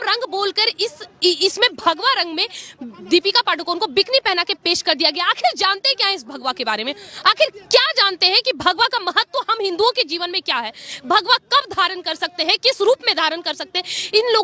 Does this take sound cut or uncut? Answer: uncut